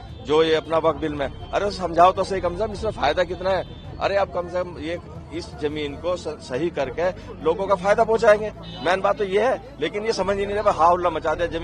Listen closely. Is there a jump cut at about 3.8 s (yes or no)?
no